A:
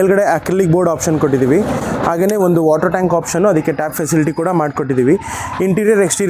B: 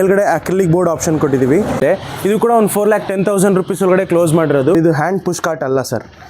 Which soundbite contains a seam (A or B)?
B